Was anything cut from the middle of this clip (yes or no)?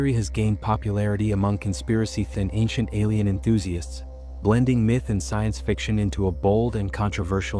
yes